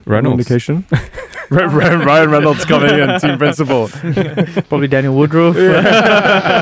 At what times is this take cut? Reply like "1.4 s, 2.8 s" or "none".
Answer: none